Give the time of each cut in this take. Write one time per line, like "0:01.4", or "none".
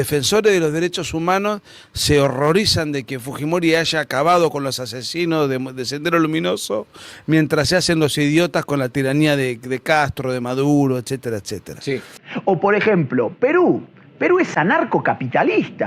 0:12.2